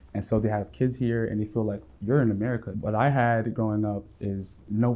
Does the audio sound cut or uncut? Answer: cut